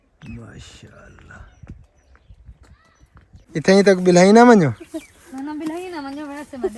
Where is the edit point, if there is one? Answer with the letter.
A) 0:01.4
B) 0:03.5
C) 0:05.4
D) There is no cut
B